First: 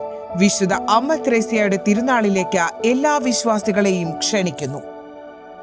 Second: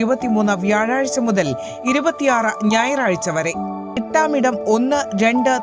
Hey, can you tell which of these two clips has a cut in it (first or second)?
second